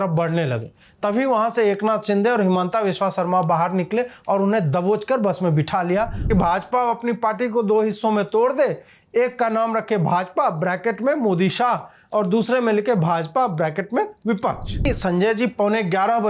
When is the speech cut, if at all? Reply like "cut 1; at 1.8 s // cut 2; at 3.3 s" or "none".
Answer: cut 1; at 6.3 s // cut 2; at 14.9 s